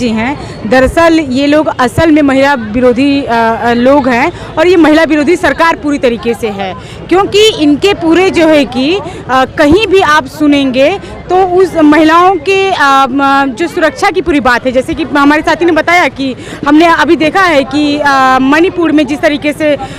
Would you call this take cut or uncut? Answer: uncut